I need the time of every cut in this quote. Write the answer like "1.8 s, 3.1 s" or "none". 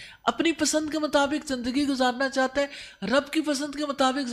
none